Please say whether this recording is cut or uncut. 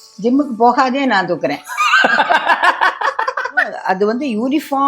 cut